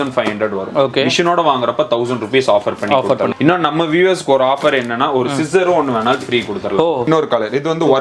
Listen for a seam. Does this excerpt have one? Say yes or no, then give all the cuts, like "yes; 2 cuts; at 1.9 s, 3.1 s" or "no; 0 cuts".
yes; 2 cuts; at 3.3 s, 7.1 s